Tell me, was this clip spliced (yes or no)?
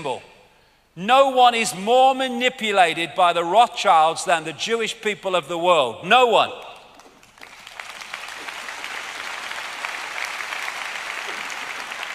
no